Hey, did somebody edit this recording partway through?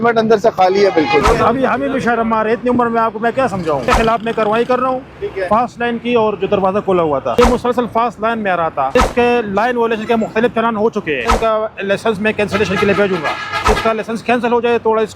yes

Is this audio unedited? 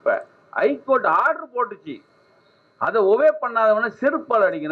yes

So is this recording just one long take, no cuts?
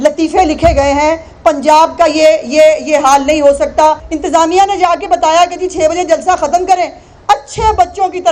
no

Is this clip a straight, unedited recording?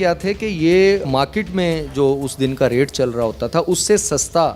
yes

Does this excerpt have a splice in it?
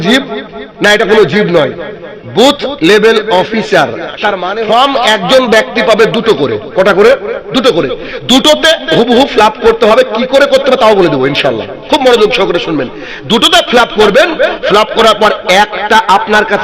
yes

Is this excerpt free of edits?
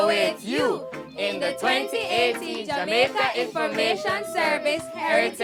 yes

